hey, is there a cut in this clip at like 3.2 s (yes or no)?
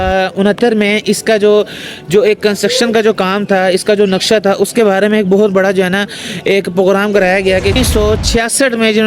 no